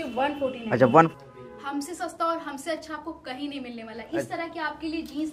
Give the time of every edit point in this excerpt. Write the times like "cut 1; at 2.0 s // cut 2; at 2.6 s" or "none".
cut 1; at 1.1 s